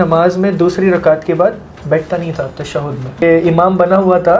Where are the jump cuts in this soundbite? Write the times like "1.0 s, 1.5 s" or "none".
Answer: 3.2 s